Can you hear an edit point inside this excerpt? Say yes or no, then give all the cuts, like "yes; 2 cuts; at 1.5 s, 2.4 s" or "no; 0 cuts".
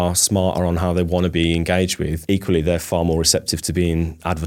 yes; 2 cuts; at 2.2 s, 3.6 s